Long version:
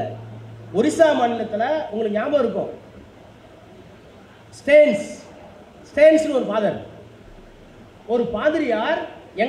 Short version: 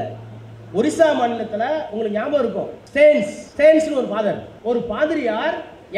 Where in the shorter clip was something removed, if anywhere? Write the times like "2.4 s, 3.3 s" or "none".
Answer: 2.8 s, 3.4 s, 4.5 s